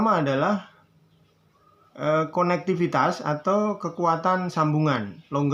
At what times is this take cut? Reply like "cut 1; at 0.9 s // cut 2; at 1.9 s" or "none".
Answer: none